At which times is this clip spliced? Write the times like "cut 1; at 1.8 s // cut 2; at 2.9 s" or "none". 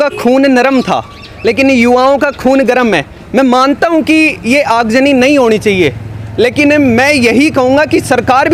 none